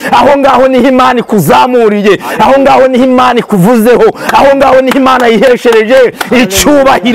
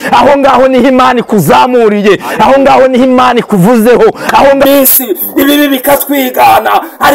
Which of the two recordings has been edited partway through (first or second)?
second